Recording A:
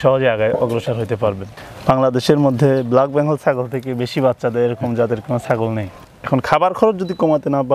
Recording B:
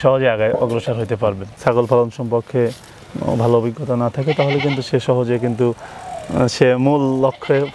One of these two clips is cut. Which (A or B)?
A